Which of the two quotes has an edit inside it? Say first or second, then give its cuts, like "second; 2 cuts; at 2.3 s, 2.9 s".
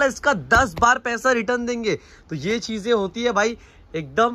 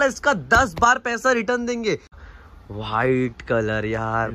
second; 1 cut; at 2.3 s